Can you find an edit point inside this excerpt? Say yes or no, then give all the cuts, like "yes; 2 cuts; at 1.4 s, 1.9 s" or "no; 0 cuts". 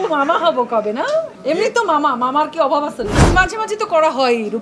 yes; 2 cuts; at 1.3 s, 3.2 s